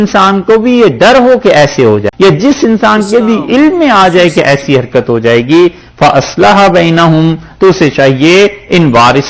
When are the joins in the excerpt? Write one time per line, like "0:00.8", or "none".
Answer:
0:02.1